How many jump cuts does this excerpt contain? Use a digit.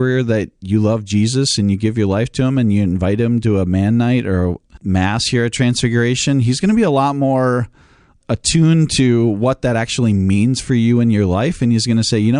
1